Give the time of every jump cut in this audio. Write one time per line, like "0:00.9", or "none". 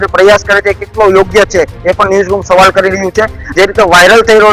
0:03.4